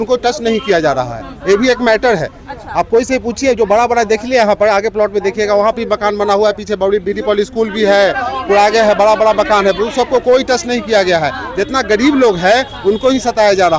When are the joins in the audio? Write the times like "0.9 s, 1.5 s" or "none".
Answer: none